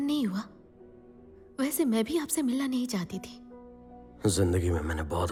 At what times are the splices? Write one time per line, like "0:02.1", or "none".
none